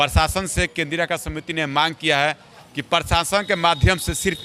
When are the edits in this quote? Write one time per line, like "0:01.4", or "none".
none